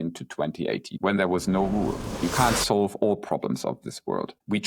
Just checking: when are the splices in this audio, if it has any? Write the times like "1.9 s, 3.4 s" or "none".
0.9 s, 2.2 s